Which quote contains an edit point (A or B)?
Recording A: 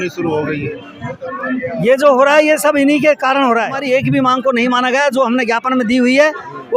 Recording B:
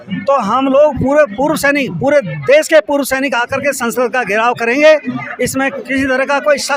A